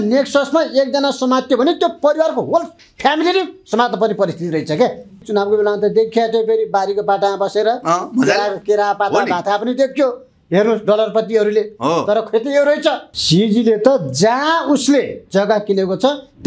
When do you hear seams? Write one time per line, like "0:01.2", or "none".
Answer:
0:05.2
0:13.1